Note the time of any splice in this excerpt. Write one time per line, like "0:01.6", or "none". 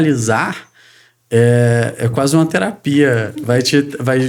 none